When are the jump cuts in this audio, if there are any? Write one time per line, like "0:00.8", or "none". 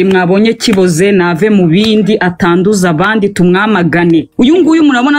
0:04.3